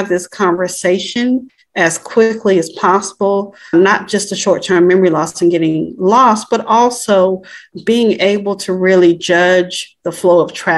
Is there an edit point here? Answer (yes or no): yes